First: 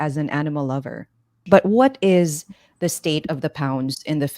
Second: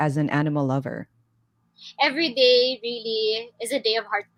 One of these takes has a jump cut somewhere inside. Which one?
first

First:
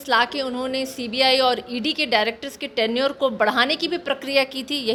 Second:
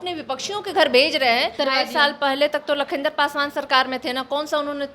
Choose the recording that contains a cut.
second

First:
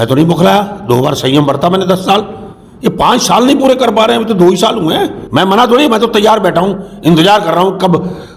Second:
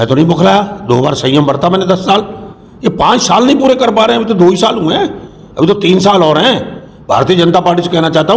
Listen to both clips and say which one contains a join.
first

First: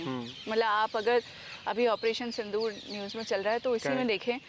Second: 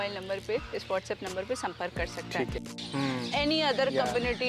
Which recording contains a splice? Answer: second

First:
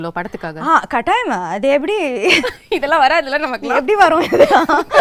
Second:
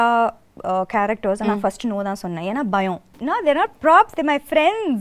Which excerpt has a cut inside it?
second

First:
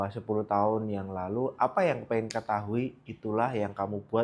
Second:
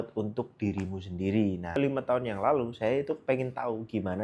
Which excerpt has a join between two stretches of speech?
second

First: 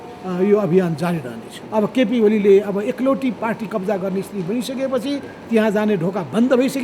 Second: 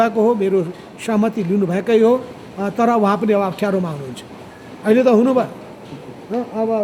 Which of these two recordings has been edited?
first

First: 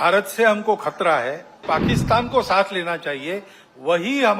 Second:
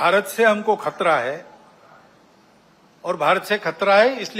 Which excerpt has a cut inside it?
first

